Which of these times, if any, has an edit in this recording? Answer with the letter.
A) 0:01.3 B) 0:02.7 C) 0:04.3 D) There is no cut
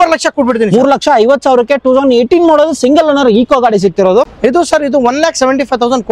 C